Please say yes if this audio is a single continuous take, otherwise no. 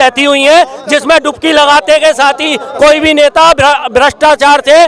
yes